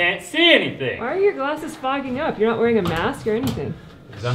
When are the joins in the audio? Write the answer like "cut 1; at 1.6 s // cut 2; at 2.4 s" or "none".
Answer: none